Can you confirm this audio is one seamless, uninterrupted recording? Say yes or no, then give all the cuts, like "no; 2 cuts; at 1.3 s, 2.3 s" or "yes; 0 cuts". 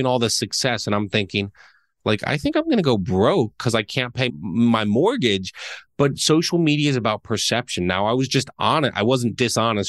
yes; 0 cuts